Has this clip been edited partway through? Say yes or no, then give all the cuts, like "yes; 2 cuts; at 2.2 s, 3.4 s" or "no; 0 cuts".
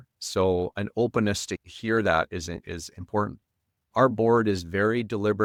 no; 0 cuts